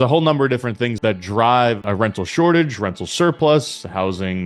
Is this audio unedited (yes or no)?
no